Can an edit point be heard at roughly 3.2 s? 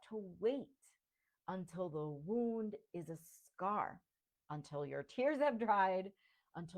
no; 0 cuts

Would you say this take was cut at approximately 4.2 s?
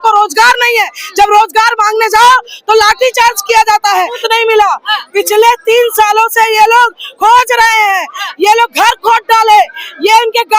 yes; 1 cut; at 4.2 s

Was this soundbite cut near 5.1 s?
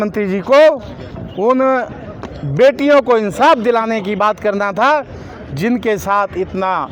no; 0 cuts

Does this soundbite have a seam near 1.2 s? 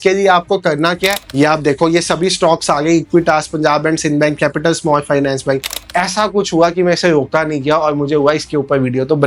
yes; 2 cuts; at 1.2 s, 5.8 s

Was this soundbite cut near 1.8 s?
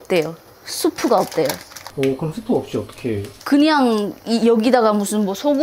yes; 1 cut; at 1.8 s

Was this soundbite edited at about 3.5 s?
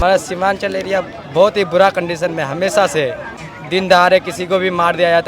yes; 1 cut; at 3.5 s

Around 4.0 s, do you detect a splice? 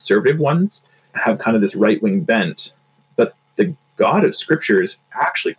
no; 1 cut; at 1.1 s

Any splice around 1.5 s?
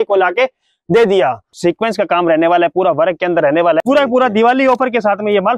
yes; 2 cuts; at 1.5 s, 3.8 s

